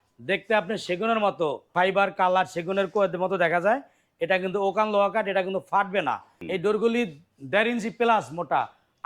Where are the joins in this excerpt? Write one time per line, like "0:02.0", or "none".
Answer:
0:01.7
0:06.3